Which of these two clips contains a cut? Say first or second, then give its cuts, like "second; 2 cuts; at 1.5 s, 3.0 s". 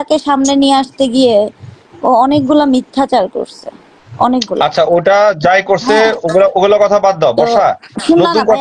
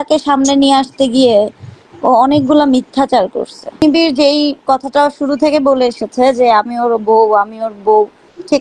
second; 1 cut; at 3.7 s